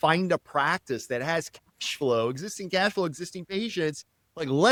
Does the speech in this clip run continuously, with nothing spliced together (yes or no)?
yes